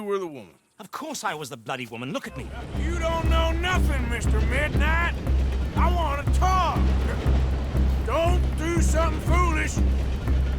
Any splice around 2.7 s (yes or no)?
yes